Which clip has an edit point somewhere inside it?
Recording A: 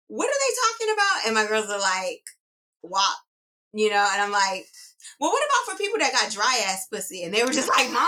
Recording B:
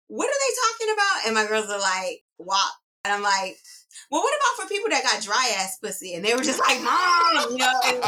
B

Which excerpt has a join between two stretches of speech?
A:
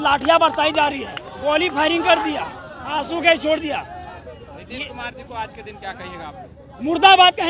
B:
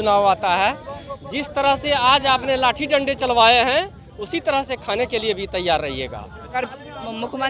B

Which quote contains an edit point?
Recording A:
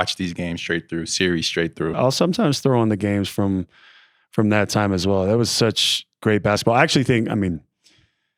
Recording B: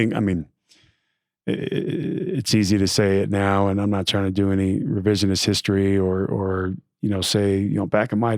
A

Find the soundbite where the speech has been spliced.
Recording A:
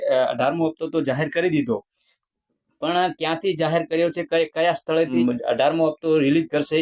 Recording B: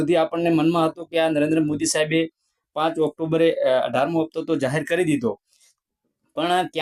A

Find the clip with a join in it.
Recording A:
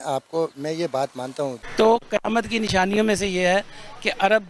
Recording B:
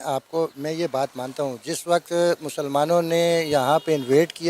A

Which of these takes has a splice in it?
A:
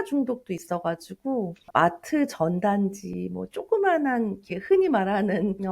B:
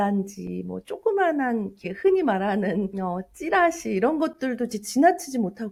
A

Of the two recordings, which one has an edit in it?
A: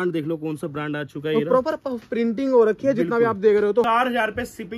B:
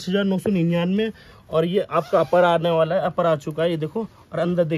A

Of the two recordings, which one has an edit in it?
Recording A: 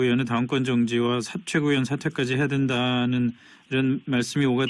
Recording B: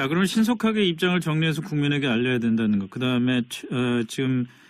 B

